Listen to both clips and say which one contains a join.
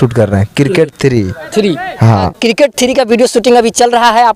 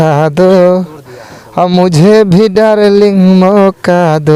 first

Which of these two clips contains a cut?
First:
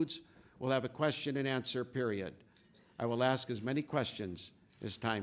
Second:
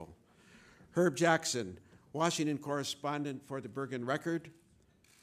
first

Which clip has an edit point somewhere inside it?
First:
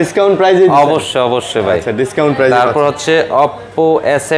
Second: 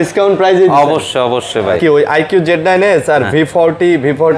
second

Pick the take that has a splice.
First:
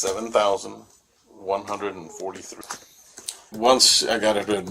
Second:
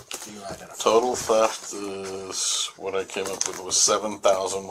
first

